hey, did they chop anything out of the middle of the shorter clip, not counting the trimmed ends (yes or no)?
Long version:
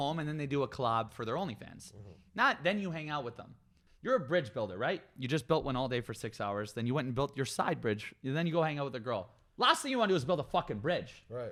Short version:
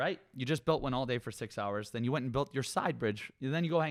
no